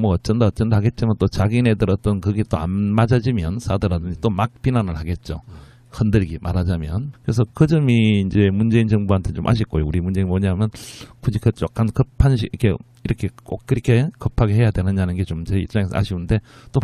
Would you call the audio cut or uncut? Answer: uncut